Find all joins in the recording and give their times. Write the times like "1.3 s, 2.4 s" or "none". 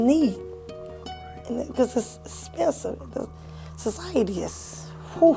none